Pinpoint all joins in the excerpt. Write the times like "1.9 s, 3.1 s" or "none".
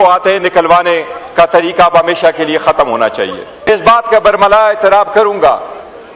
3.7 s